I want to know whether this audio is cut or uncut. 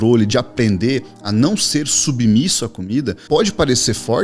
cut